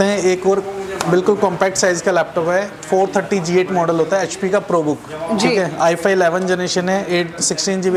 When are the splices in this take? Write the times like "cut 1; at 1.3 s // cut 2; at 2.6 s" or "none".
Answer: none

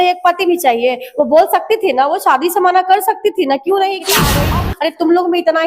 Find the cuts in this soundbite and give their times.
cut 1; at 4.4 s

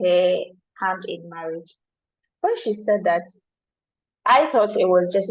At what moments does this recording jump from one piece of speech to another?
none

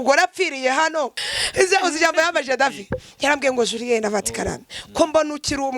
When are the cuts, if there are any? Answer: cut 1; at 1.3 s

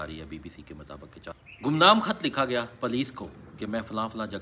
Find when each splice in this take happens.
cut 1; at 1.3 s

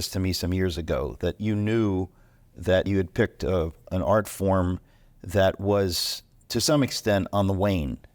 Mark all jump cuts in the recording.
cut 1; at 1.4 s // cut 2; at 2.9 s

